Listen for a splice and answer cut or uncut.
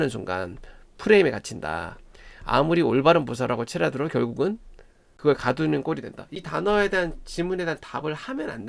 cut